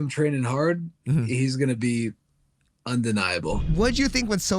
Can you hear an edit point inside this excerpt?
yes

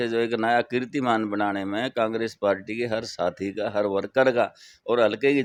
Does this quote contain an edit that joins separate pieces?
no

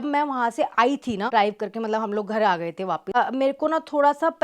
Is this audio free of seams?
no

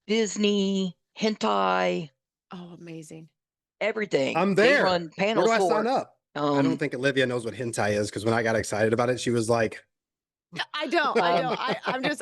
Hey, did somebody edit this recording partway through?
yes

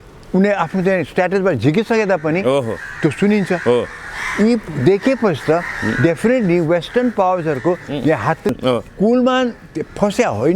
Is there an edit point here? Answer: yes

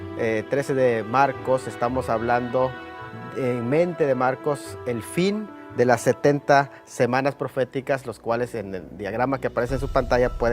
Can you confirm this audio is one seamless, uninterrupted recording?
no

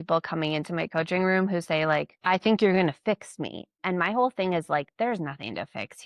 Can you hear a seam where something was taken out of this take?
yes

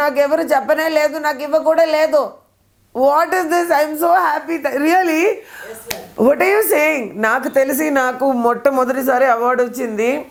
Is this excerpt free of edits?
yes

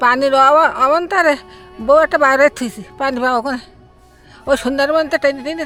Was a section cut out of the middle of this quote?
no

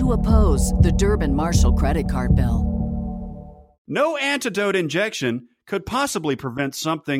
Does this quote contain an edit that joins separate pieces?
yes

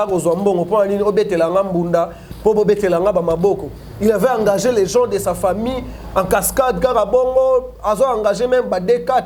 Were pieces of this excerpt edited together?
no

